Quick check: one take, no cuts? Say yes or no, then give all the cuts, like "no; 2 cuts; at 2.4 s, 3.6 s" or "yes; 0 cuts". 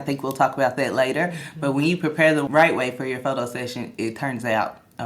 no; 1 cut; at 2.4 s